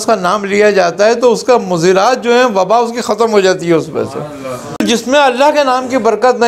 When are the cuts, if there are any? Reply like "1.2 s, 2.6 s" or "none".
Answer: 4.8 s